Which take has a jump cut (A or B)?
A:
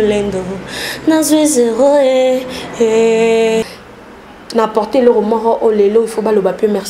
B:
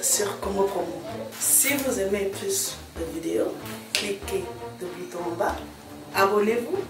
A